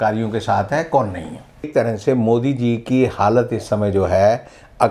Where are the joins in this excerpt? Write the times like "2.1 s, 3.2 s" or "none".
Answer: 1.7 s